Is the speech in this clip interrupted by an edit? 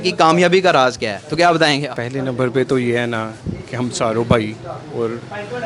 no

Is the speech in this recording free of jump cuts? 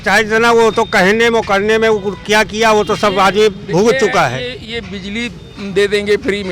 yes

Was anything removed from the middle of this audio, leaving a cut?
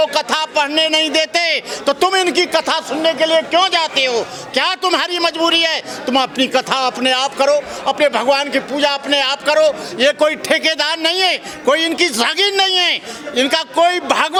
no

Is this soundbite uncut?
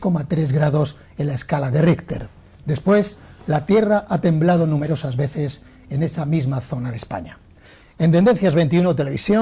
no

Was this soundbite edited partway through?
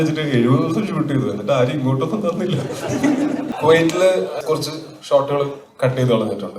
yes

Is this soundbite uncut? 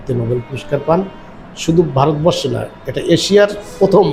yes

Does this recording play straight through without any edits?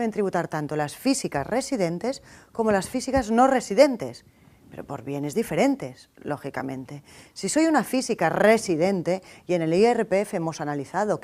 no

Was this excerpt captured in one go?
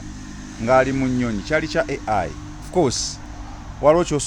yes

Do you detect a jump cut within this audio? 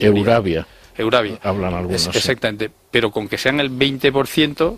no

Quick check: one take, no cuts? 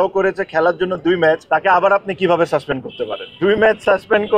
no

